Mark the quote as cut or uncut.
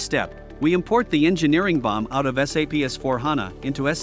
uncut